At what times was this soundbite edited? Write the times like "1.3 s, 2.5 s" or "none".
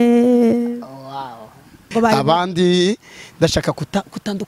1.8 s